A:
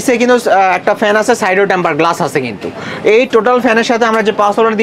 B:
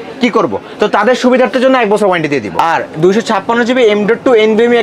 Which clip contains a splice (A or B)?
B